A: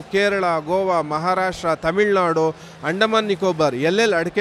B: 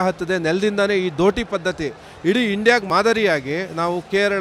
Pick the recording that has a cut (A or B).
B